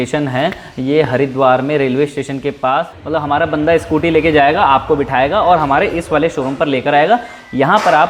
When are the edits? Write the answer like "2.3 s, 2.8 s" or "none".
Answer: 3.0 s